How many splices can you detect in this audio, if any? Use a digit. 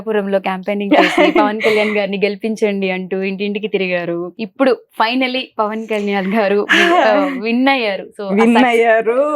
1